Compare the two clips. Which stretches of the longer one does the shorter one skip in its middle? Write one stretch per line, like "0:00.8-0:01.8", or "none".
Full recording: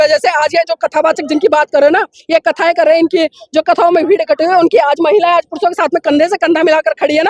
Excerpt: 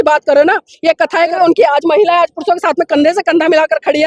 0:02.8-0:04.5